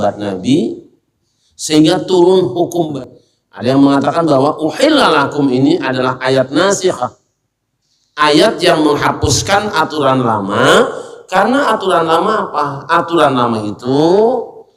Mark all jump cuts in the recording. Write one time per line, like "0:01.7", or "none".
0:02.9